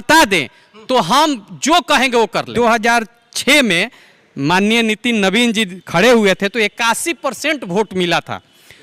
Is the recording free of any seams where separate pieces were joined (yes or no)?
no